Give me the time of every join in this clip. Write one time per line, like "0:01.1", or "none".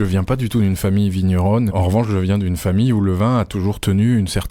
0:01.7